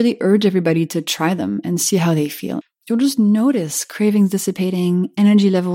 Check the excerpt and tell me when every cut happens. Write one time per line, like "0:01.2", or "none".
0:02.5